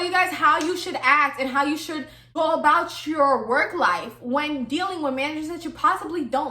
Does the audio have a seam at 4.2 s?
no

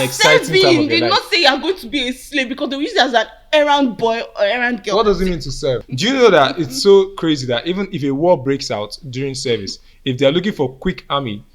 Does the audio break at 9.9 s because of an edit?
no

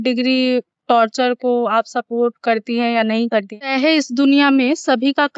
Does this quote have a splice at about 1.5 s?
no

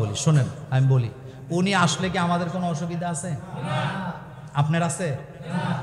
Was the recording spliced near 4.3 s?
no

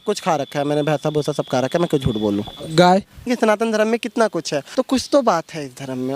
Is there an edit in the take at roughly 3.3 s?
yes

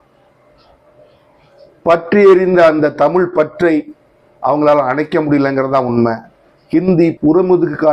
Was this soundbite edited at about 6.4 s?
no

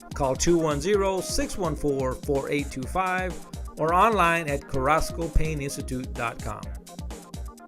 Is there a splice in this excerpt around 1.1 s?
no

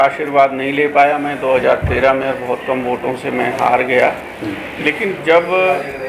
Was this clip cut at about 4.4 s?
no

